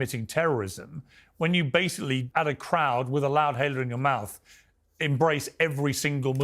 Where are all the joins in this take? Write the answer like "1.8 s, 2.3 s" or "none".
2.3 s